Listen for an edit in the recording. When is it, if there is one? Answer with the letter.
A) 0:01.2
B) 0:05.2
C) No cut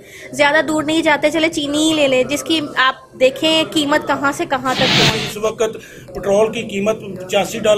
B